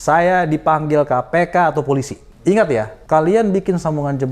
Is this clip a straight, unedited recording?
no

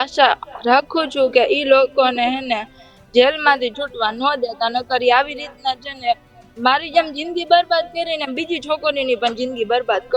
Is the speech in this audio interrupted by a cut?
no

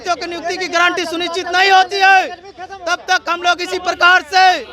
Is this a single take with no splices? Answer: yes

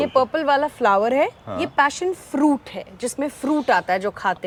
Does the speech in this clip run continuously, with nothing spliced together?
yes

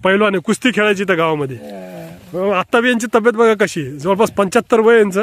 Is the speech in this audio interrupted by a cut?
no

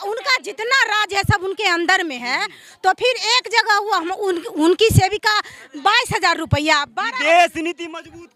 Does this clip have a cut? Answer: no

